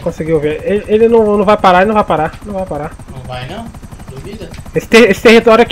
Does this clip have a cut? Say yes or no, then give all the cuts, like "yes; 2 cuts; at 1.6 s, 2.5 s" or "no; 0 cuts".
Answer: no; 0 cuts